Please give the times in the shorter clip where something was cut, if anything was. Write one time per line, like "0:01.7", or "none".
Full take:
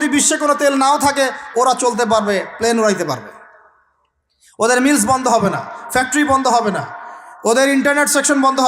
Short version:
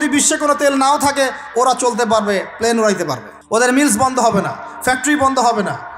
0:03.3